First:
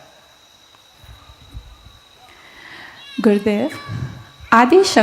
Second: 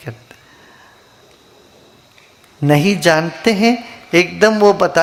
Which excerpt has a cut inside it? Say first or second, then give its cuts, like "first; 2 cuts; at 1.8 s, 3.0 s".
first; 1 cut; at 0.9 s